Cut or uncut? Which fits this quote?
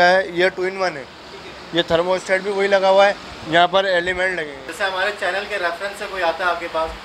cut